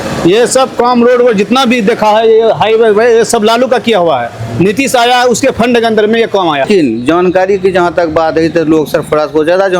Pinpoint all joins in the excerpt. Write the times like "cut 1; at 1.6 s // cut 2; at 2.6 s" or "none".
cut 1; at 6.6 s